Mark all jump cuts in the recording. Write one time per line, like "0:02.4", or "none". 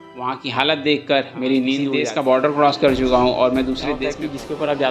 0:01.9
0:03.9